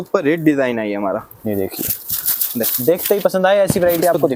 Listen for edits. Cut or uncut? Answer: uncut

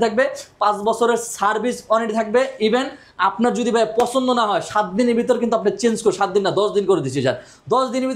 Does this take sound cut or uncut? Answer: uncut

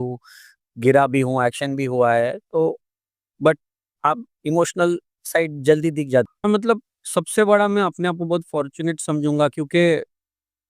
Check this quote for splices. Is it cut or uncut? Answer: cut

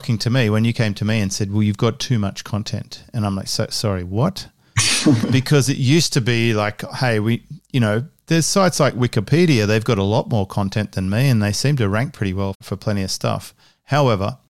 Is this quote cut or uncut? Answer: uncut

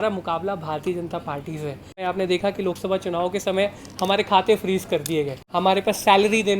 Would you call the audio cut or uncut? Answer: cut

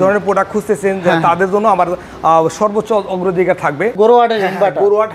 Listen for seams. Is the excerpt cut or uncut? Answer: cut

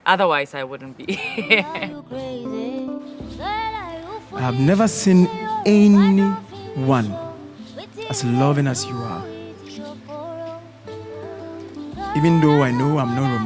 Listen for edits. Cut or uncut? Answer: cut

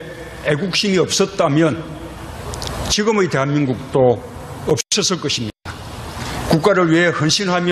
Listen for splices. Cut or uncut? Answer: uncut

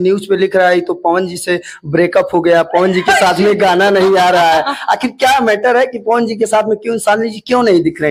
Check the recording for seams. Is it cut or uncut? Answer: uncut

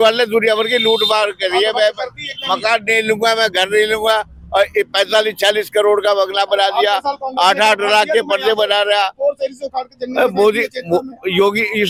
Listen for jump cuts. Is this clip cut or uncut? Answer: uncut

